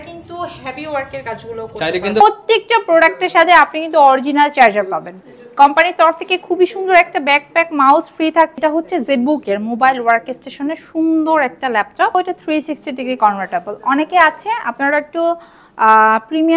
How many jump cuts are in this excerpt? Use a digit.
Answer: 3